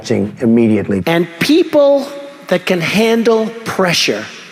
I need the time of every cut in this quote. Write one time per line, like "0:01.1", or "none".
0:01.0